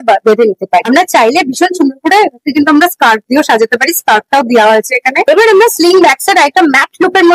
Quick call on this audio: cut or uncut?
uncut